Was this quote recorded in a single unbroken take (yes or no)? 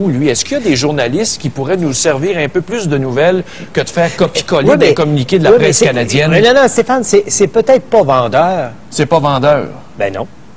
yes